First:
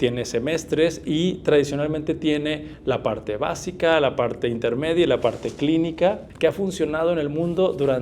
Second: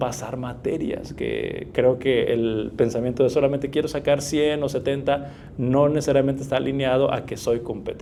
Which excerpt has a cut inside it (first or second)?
first